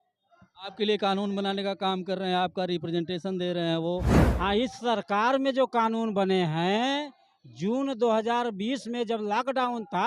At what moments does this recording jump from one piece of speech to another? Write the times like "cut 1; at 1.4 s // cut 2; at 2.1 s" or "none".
cut 1; at 4.2 s